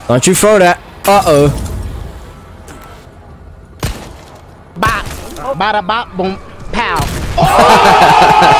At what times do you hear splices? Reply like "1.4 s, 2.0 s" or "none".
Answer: none